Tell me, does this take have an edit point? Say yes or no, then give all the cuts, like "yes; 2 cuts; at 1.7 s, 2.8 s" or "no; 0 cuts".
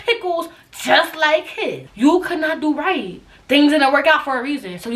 yes; 1 cut; at 1.8 s